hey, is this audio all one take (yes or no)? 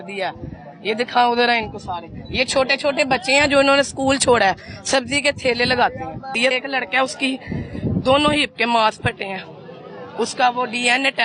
no